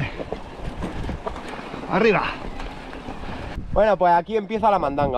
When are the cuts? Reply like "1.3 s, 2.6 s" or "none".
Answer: 3.6 s